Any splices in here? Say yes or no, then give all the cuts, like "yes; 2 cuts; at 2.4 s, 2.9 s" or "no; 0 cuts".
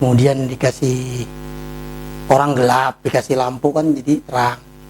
no; 0 cuts